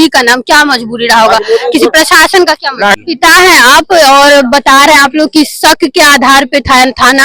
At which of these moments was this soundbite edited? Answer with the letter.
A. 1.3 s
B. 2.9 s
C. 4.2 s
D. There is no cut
B